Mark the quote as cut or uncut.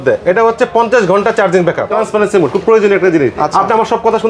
cut